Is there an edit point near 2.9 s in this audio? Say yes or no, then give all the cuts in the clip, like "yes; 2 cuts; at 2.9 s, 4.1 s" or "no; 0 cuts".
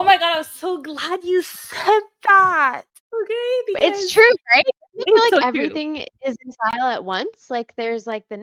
yes; 1 cut; at 2.9 s